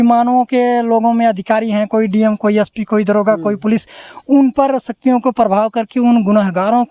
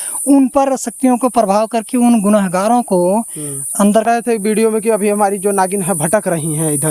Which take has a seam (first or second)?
second